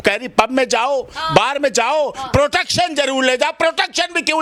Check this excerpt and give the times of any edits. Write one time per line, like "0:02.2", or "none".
none